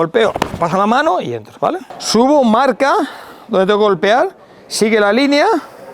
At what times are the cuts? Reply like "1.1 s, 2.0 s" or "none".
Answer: 1.9 s